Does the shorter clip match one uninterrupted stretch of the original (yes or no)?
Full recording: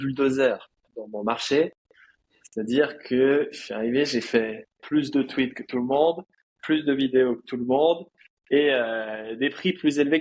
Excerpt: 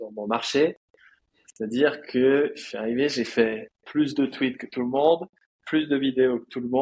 yes